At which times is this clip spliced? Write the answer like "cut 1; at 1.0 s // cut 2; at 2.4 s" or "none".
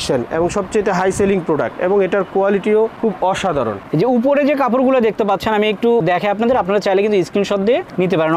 cut 1; at 3.8 s